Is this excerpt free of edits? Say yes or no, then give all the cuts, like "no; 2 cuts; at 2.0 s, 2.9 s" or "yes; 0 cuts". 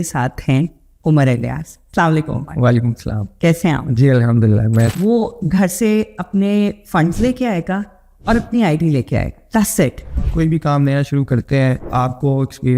no; 2 cuts; at 4.9 s, 10.2 s